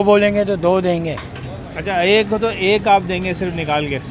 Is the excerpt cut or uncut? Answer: uncut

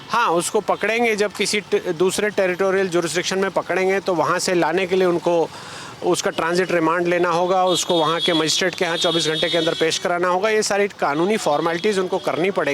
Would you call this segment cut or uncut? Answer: uncut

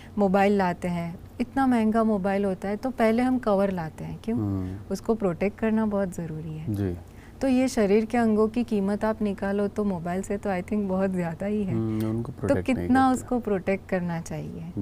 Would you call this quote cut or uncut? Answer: uncut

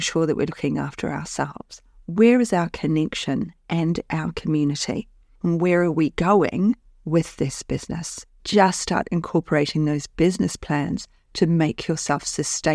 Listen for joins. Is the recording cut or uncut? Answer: cut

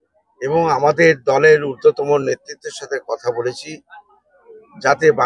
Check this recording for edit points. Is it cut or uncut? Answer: uncut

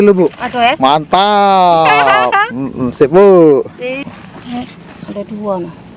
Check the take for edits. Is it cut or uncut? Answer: cut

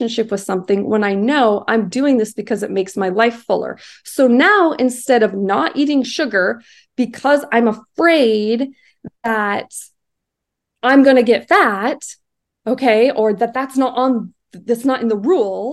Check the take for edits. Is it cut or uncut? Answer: uncut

